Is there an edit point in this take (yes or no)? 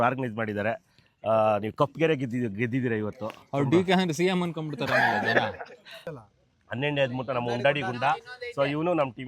yes